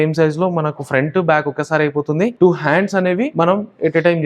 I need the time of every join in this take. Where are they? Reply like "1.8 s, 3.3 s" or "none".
2.3 s, 3.3 s